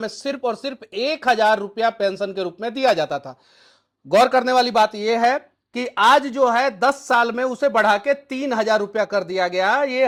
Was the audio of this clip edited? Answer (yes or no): no